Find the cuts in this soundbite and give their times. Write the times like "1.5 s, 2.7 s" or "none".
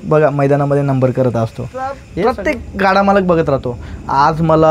2.0 s